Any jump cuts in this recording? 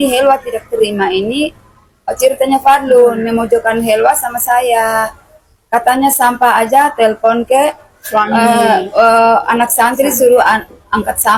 no; 0 cuts

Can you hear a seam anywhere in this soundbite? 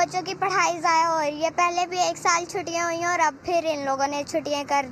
no; 0 cuts

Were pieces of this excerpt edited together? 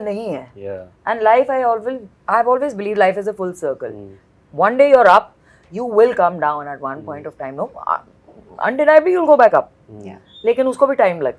no; 0 cuts

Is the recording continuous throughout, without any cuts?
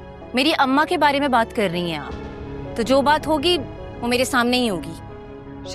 yes; 0 cuts

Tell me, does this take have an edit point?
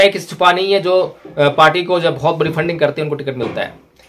no; 0 cuts

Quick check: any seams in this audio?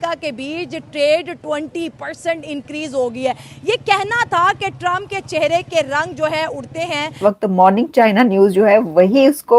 yes; 1 cut; at 7.1 s

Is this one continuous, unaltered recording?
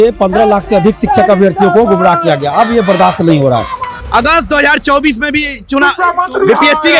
no; 1 cut; at 4.0 s

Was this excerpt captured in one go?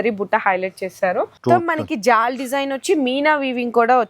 no; 1 cut; at 1.3 s

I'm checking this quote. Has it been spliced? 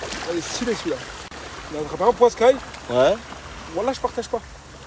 yes; 1 cut; at 0.9 s

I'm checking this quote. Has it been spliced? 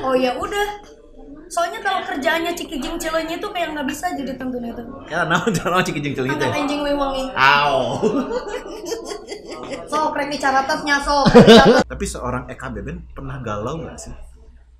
yes; 1 cut; at 11.8 s

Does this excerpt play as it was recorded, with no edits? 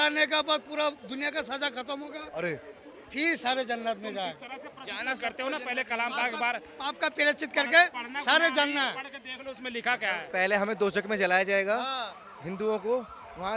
yes; 0 cuts

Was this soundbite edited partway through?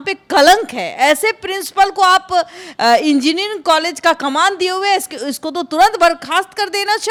no; 0 cuts

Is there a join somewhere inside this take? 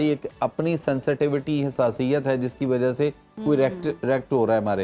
no; 0 cuts

